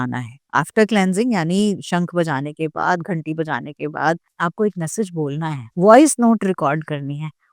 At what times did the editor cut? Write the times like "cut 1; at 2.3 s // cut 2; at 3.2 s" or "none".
cut 1; at 4.3 s